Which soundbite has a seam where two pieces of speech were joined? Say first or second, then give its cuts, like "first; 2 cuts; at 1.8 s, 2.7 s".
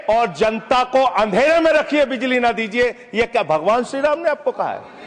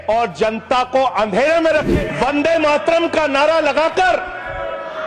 second; 1 cut; at 1.9 s